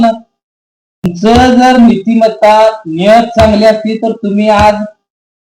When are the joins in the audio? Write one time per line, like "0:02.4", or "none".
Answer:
0:01.1